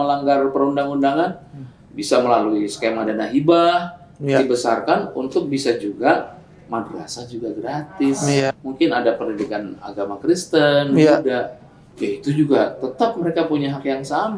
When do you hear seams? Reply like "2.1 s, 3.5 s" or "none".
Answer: 8.5 s